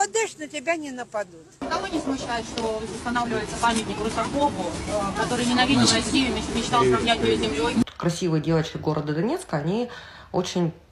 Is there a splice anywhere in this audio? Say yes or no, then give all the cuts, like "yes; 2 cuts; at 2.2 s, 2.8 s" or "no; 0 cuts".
yes; 2 cuts; at 2.0 s, 7.8 s